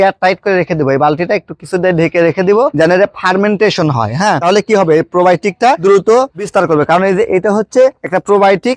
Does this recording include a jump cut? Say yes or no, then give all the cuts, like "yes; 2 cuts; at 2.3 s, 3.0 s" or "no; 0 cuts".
yes; 3 cuts; at 2.7 s, 4.4 s, 5.8 s